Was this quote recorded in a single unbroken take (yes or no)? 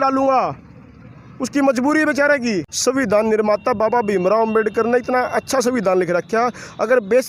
no